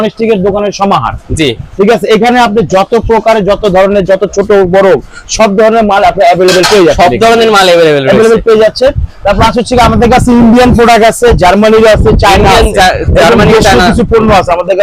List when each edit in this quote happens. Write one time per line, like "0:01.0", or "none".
none